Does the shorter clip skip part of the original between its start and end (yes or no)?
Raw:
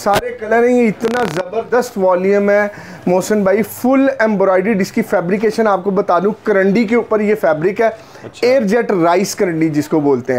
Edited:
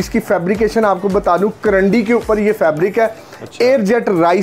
no